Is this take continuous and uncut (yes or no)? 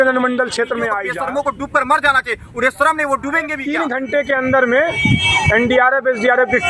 no